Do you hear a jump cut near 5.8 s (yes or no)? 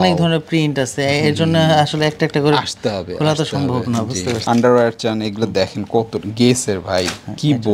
no